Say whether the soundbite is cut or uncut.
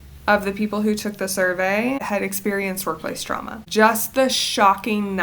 cut